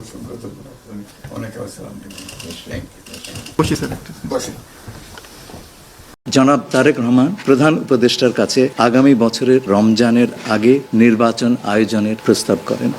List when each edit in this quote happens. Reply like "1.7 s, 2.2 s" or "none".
6.1 s

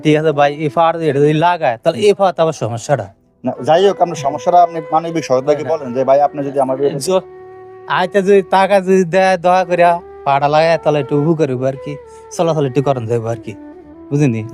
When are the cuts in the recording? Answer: none

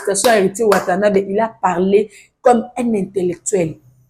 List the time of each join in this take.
none

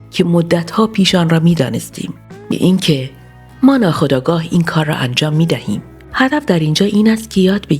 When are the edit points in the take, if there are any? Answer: 2.5 s

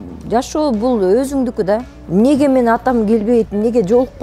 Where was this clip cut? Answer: 2.0 s

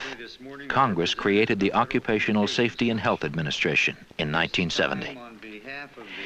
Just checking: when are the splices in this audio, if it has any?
3.0 s

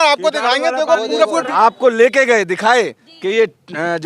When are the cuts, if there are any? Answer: 1.5 s

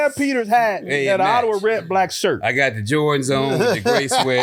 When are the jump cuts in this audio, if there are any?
none

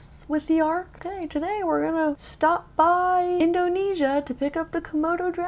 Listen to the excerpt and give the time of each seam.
1.0 s, 2.3 s, 3.4 s

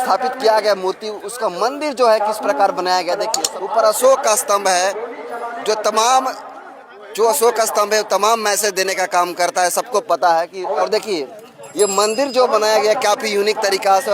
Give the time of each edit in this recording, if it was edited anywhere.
3.4 s, 10.8 s

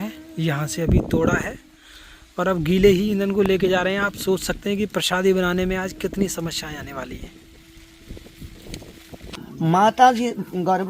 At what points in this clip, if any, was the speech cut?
9.3 s

